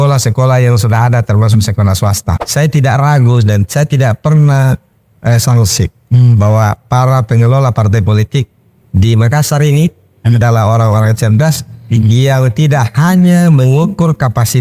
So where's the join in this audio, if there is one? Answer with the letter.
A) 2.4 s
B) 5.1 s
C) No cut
A